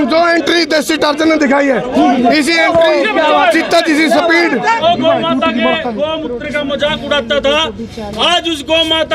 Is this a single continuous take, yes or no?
no